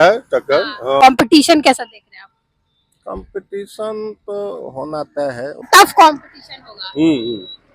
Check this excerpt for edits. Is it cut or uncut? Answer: cut